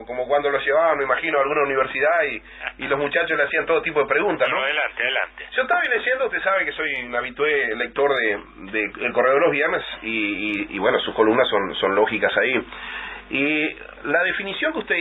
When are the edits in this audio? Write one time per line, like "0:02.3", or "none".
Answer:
0:06.4

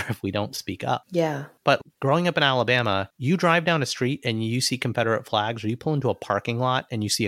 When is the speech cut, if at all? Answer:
0:01.1
0:03.1

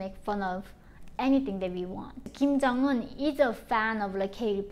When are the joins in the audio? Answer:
0:02.3

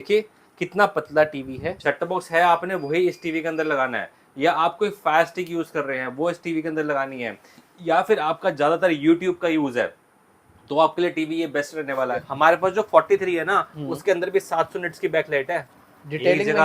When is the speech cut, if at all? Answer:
0:01.7
0:12.2
0:15.7

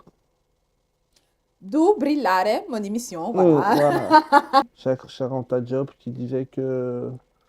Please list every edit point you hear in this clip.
0:04.6

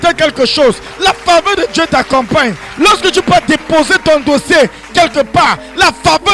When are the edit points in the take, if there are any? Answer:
none

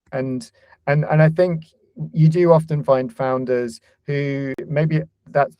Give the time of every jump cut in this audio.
0:04.7

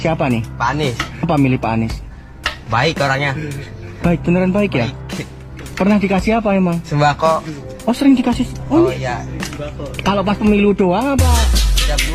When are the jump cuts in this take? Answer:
none

